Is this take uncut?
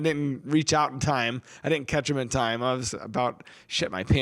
yes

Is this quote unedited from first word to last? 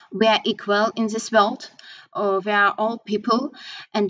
yes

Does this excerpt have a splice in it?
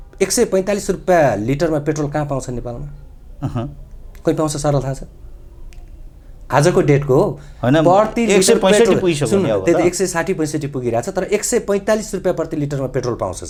no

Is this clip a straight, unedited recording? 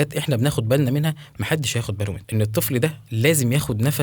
no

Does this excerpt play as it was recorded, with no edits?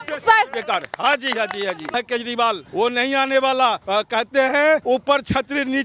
no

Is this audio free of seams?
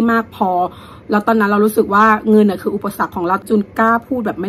no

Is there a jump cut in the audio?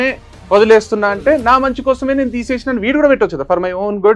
no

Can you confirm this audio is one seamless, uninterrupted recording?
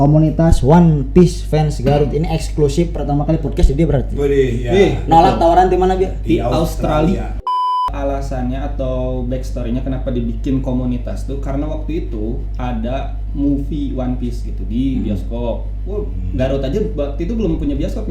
no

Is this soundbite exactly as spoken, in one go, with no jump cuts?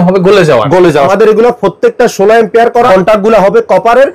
no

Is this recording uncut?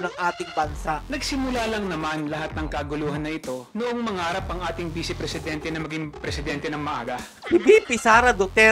no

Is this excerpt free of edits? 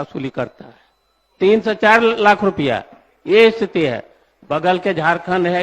yes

